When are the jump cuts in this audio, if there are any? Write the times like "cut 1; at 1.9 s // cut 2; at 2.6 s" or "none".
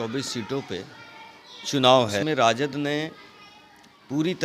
cut 1; at 2.2 s